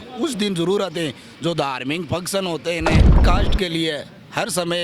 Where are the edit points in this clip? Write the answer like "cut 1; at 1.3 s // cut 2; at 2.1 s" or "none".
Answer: cut 1; at 3.2 s